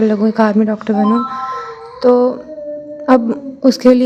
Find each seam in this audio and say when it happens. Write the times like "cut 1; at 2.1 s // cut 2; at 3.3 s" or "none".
none